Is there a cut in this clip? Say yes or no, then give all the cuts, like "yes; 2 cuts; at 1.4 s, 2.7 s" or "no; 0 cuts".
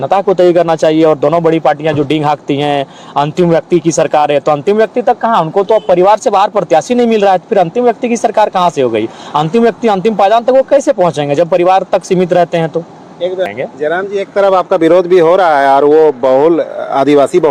no; 0 cuts